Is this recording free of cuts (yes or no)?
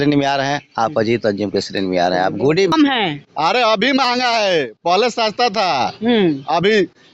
no